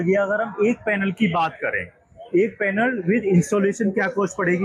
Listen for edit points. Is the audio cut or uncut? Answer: uncut